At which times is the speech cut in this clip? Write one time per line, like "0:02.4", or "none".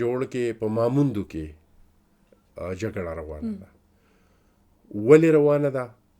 none